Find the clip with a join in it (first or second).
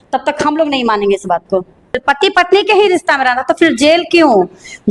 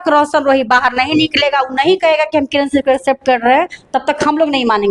first